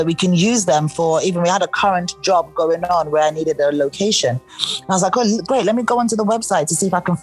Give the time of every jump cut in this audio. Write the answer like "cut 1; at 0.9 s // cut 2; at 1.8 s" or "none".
none